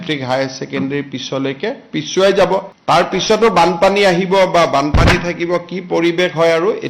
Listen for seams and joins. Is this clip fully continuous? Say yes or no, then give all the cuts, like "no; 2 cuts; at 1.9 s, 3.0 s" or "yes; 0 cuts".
no; 1 cut; at 2.7 s